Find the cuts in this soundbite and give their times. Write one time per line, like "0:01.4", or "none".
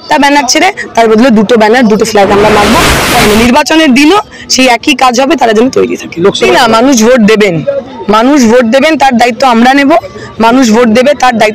0:03.2
0:06.5